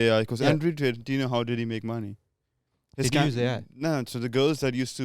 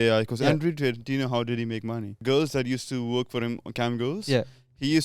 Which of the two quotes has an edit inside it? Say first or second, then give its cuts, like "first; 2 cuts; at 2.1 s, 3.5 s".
second; 1 cut; at 2.2 s